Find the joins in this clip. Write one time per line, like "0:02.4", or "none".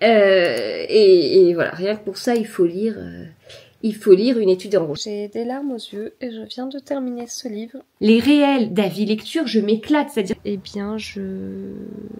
0:05.0
0:07.8
0:10.4